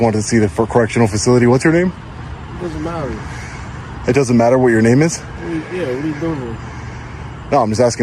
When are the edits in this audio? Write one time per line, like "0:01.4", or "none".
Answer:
none